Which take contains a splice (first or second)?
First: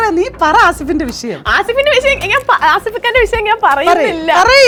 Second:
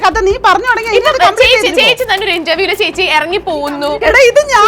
second